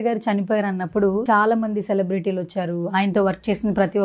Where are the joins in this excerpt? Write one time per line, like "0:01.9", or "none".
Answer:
0:01.2